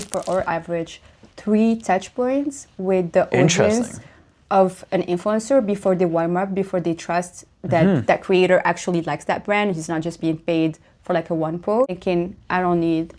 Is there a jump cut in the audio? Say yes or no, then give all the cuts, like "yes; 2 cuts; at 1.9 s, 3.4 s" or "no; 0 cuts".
yes; 1 cut; at 12.0 s